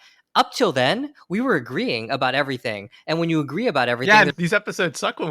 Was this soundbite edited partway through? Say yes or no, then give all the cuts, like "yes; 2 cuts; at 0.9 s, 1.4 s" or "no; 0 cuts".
yes; 1 cut; at 4.3 s